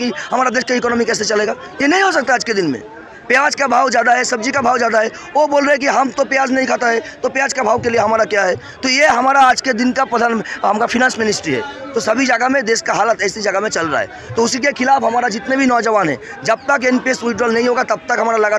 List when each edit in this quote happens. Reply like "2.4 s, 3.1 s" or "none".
none